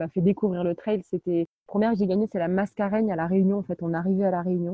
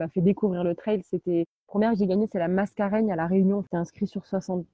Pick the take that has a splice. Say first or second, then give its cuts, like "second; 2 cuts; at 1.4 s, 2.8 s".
second; 1 cut; at 3.7 s